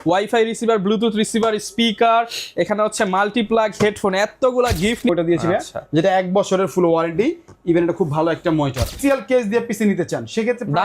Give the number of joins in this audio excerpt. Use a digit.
2